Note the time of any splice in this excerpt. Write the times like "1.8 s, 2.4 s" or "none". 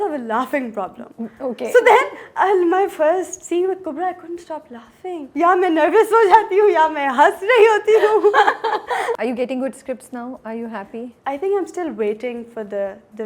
5.2 s, 9.1 s